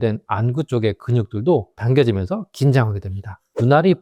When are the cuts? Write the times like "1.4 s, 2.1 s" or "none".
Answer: none